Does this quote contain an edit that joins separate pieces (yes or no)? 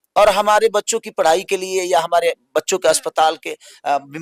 no